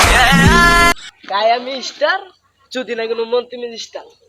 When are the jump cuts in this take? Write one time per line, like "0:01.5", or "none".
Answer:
0:00.9